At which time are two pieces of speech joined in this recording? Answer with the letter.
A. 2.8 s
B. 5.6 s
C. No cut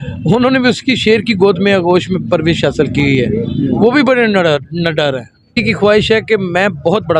B